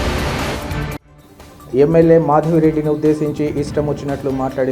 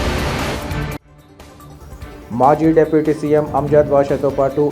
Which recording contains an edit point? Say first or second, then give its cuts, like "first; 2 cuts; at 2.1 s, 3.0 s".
first; 1 cut; at 1.1 s